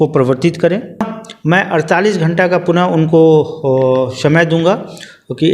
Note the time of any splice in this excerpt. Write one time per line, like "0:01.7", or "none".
0:01.0